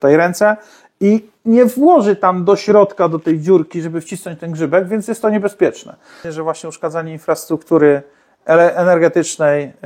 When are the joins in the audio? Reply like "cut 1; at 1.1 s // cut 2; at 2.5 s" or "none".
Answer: cut 1; at 6.3 s